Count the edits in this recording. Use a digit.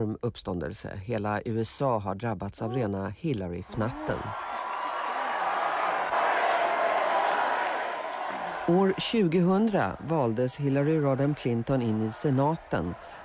0